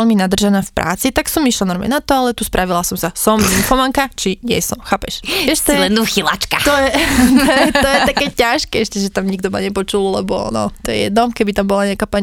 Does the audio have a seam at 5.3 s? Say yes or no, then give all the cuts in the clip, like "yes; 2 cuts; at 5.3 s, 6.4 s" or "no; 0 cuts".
no; 0 cuts